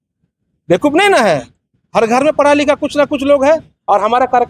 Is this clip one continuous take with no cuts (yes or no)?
yes